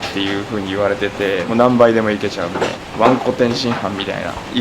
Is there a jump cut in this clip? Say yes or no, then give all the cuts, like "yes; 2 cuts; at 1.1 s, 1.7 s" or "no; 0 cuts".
yes; 2 cuts; at 1.4 s, 2.8 s